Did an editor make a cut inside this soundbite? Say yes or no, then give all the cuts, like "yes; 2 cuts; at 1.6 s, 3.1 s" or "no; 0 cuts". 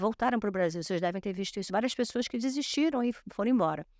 no; 0 cuts